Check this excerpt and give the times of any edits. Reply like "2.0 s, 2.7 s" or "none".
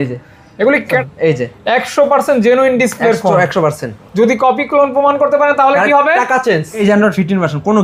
1.0 s, 6.7 s